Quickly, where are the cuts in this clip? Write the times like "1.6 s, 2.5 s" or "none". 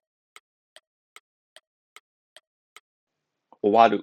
none